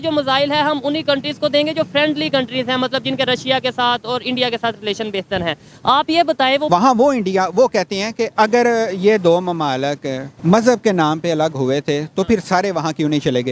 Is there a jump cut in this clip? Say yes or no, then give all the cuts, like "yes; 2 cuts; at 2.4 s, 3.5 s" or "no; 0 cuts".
yes; 3 cuts; at 6.7 s, 8.3 s, 10.3 s